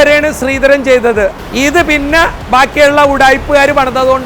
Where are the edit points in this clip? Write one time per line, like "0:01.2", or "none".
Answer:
0:01.4